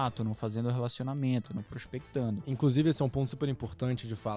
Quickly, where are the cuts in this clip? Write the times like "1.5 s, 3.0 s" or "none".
none